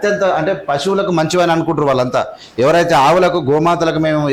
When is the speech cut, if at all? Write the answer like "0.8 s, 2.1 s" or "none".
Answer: none

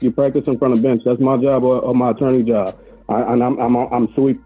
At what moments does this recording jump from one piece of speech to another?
none

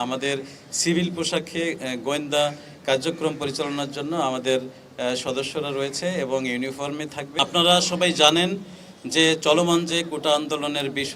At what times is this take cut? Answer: 7.3 s

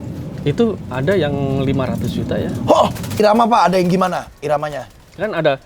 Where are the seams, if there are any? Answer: 3.2 s

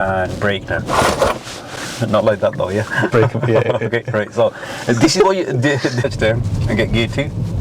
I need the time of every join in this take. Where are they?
1.6 s, 6.0 s

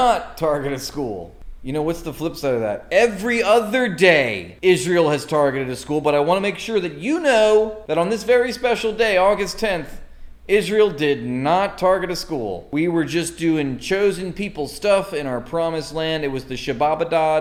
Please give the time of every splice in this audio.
none

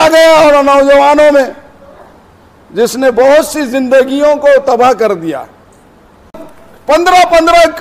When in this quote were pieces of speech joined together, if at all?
6.4 s

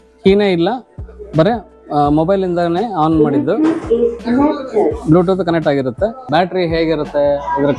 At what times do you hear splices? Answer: 6.2 s

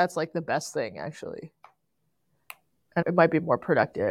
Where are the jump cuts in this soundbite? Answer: 3.0 s

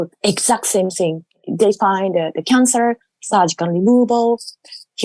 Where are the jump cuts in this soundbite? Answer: 1.5 s

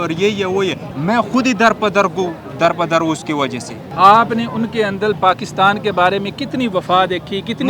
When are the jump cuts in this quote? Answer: 0.9 s, 3.8 s

